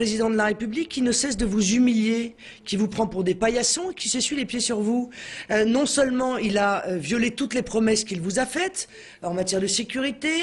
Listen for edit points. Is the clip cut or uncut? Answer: uncut